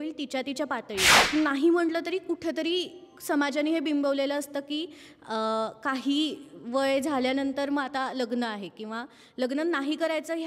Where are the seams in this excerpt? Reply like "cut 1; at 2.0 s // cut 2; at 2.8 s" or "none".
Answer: cut 1; at 1.2 s